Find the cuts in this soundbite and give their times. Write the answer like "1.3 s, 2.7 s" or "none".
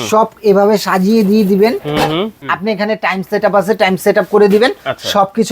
2.4 s